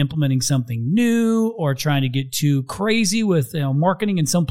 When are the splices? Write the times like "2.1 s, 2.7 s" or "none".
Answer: none